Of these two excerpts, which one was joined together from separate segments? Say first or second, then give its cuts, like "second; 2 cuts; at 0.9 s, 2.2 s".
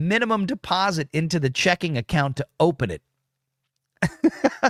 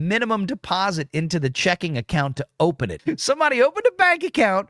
second; 1 cut; at 3.1 s